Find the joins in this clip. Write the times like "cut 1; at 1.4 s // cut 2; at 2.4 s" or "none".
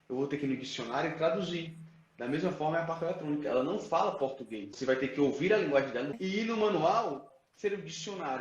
cut 1; at 4.7 s // cut 2; at 6.2 s